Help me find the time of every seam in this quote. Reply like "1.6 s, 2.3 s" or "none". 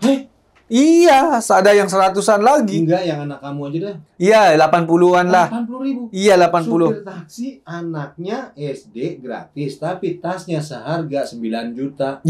none

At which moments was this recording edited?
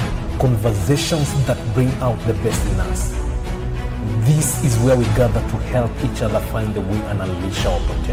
none

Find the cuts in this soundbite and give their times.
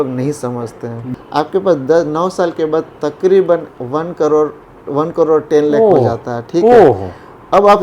1.1 s

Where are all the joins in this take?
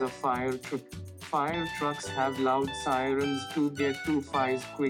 none

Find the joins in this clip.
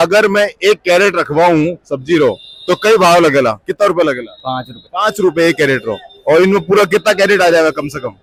none

